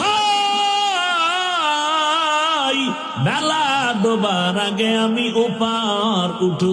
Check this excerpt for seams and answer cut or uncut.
uncut